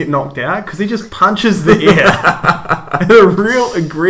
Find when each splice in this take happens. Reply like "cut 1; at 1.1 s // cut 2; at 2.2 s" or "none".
none